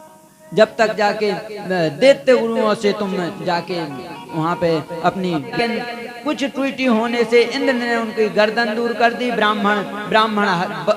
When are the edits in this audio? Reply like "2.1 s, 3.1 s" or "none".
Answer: 5.6 s